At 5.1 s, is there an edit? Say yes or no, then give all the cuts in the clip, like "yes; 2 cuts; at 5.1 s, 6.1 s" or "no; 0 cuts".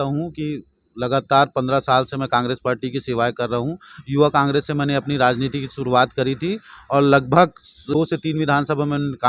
no; 1 cut; at 7.9 s